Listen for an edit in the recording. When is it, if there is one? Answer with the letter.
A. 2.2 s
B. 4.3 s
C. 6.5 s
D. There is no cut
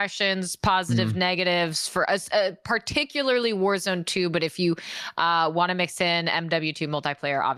D